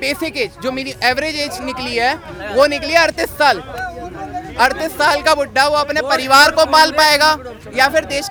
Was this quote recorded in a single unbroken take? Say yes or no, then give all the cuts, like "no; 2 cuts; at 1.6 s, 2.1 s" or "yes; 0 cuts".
yes; 0 cuts